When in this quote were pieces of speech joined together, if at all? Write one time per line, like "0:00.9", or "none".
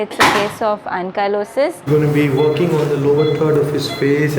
0:01.8